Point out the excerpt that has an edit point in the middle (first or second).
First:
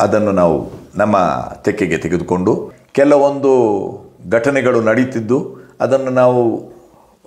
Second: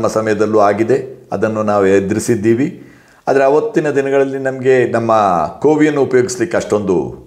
first